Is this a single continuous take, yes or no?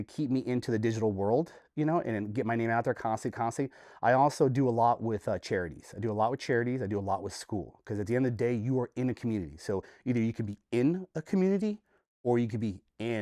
yes